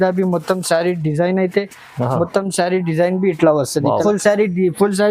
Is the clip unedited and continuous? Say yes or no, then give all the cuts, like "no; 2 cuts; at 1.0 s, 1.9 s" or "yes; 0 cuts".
no; 1 cut; at 4.0 s